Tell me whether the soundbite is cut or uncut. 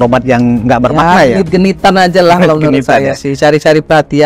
uncut